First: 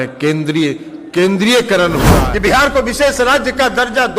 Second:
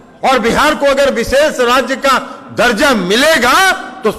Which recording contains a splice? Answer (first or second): first